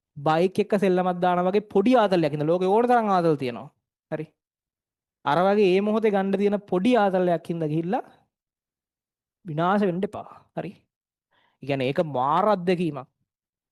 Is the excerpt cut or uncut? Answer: uncut